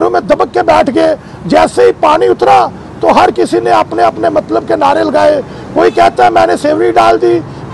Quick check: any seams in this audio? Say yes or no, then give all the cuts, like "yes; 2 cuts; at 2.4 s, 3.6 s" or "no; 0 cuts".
no; 0 cuts